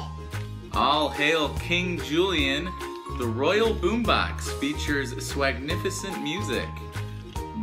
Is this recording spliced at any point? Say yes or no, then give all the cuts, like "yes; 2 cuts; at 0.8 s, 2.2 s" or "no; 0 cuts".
yes; 1 cut; at 6.5 s